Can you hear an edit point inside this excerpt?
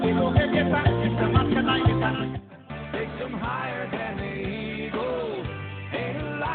yes; 1 cut; at 2.7 s

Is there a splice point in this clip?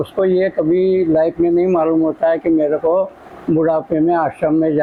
no; 0 cuts

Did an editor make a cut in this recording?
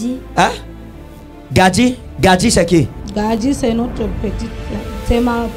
yes; 1 cut; at 2.9 s

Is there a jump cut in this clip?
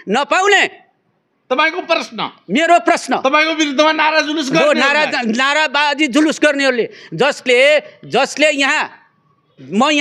no; 0 cuts

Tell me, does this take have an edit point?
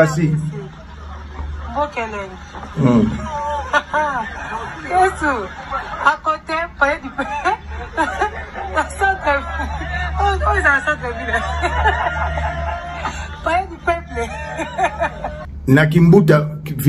yes; 1 cut; at 15.5 s

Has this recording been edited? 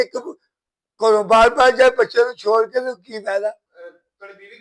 yes; 1 cut; at 3.7 s

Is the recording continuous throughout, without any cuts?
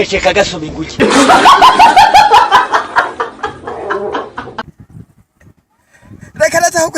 no; 1 cut; at 3.5 s

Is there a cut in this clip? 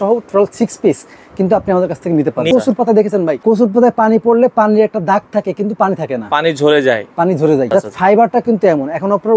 yes; 3 cuts; at 2.5 s, 3.4 s, 7.7 s

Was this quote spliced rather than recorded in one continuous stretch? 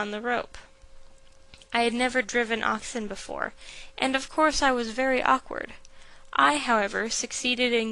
yes; 1 cut; at 4.2 s

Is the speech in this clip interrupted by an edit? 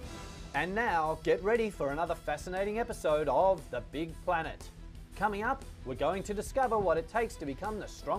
no; 0 cuts

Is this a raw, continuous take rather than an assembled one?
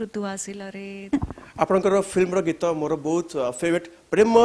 no; 1 cut; at 1.0 s

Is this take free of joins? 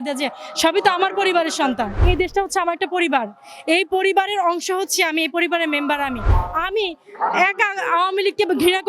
no; 2 cuts; at 2.0 s, 6.4 s

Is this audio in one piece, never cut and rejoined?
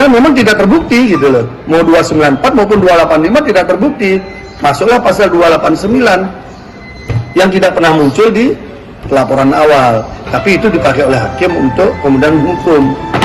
yes; 0 cuts

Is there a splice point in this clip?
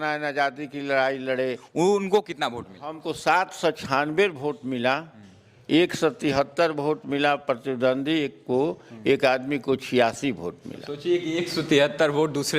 yes; 1 cut; at 1.6 s

